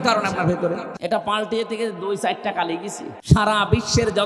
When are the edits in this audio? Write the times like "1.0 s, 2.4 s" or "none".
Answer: 0.9 s, 3.1 s